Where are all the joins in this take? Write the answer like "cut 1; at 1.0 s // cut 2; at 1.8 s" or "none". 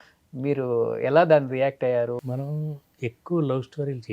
cut 1; at 2.2 s